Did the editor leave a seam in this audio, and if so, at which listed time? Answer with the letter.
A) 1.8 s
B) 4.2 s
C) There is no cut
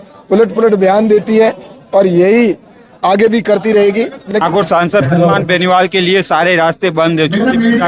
B